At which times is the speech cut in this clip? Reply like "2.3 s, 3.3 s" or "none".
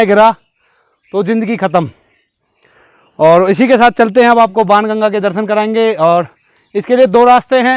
none